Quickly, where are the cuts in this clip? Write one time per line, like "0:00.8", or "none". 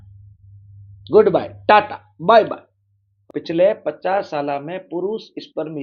0:03.2